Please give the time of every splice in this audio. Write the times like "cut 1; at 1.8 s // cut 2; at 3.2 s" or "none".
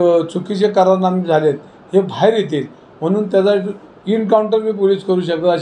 none